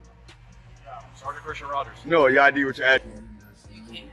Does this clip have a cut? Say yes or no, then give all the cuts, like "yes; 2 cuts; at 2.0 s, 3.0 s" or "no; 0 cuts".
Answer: yes; 1 cut; at 3.1 s